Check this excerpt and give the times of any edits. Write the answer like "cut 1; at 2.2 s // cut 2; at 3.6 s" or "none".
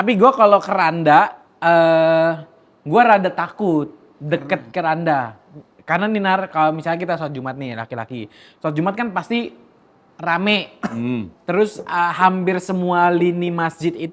none